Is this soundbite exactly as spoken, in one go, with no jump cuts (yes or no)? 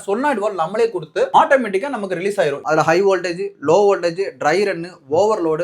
no